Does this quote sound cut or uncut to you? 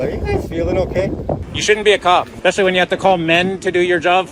cut